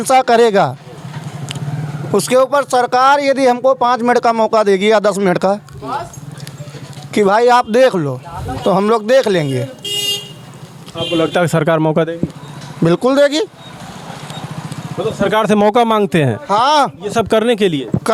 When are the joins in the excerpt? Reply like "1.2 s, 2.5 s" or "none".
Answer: none

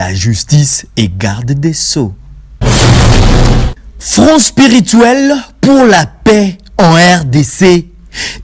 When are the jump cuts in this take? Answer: 2.6 s, 3.9 s

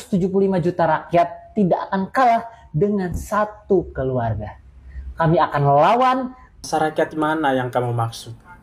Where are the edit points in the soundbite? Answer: 5.0 s

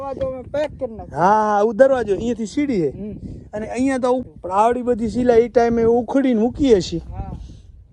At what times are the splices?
4.2 s

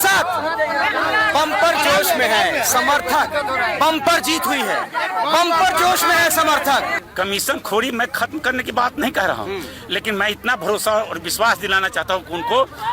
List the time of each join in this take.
7.0 s

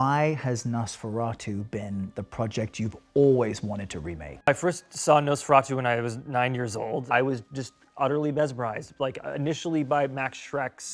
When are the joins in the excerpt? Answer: 4.5 s, 7.1 s

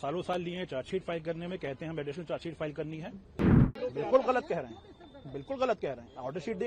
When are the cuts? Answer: 3.7 s

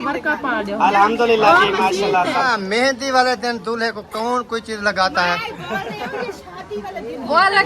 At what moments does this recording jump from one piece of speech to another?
2.6 s

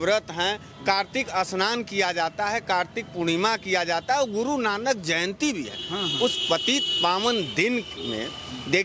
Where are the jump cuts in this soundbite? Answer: none

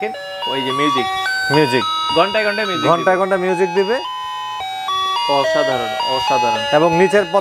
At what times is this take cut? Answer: none

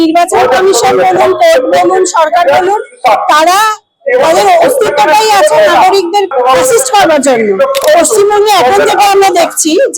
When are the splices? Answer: 6.3 s, 7.8 s

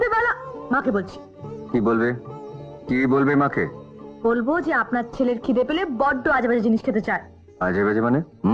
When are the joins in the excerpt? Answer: none

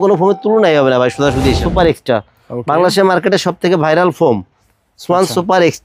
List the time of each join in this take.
1.6 s

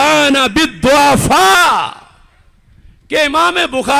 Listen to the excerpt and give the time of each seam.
none

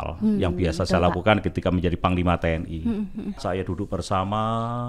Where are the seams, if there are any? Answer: 3.4 s

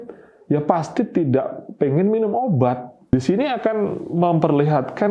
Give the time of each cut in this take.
2.9 s

